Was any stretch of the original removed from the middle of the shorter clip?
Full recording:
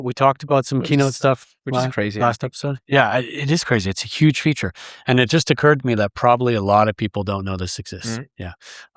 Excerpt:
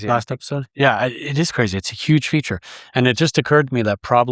no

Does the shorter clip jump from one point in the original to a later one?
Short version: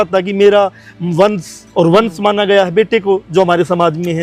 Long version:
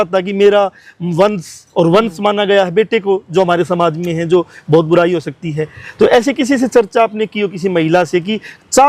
no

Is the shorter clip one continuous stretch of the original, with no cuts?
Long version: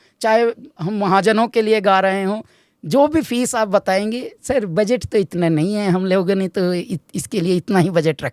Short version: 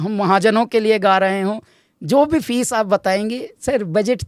yes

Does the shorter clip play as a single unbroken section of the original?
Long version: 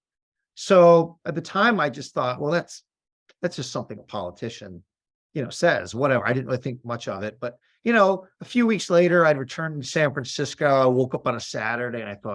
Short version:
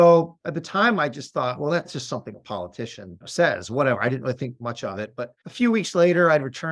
no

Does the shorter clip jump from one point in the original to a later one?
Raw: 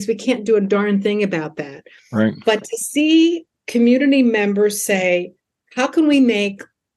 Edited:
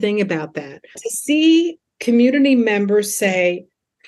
yes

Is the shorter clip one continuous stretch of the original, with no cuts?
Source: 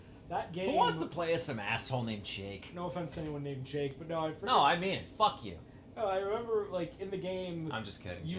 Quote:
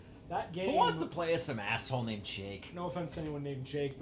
yes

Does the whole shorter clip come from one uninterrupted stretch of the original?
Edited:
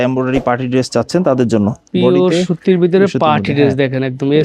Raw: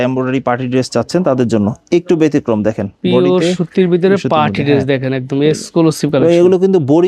no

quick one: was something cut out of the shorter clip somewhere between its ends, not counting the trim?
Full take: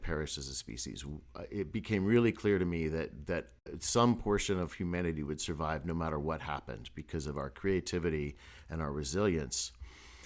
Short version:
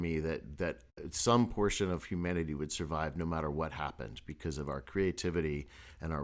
no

